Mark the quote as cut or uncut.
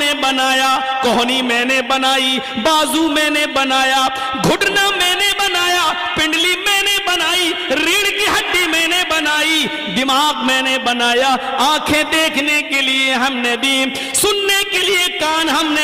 uncut